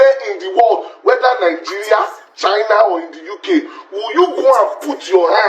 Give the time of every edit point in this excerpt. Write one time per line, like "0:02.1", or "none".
none